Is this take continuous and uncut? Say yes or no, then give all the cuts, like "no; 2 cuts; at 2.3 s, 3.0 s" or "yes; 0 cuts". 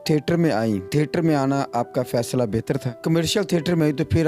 no; 2 cuts; at 0.8 s, 3.0 s